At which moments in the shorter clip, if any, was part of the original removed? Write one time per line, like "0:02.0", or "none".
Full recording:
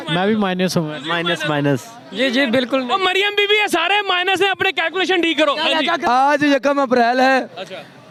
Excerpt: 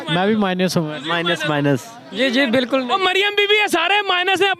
none